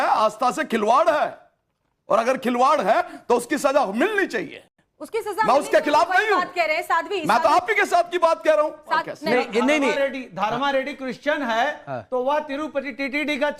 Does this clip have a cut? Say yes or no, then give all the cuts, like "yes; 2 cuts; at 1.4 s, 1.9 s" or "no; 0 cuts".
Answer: yes; 1 cut; at 9.1 s